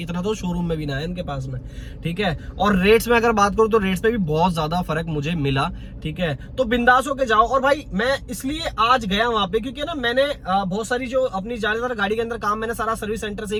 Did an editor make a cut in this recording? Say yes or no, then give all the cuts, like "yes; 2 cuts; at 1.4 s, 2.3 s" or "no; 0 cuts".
no; 0 cuts